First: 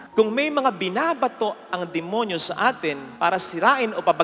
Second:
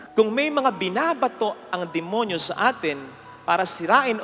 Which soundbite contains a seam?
first; 1 cut; at 3.1 s

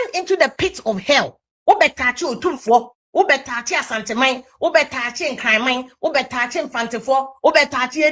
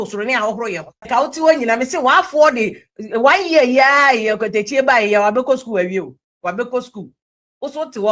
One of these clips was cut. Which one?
second; 1 cut; at 1.0 s

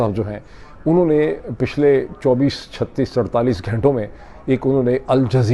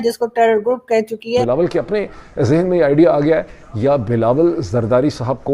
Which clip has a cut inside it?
second; 1 cut; at 1.4 s

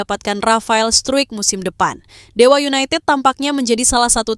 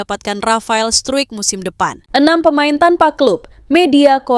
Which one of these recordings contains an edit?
second; 1 cut; at 2.0 s

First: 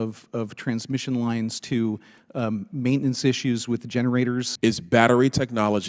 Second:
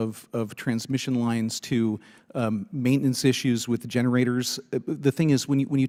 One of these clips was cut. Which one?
first; 1 cut; at 4.5 s

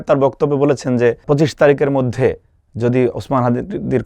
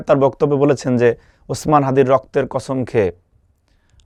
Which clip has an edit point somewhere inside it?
first; 1 cut; at 1.2 s

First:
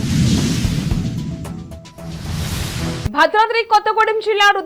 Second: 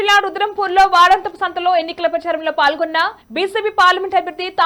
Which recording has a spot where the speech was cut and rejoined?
first; 1 cut; at 3.1 s

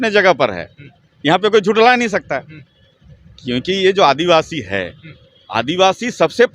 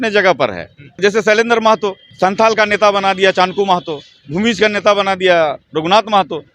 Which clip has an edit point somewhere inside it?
second; 2 cuts; at 1.0 s, 2.0 s

